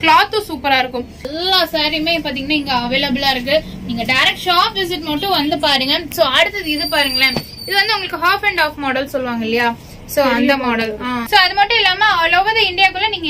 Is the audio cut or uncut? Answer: cut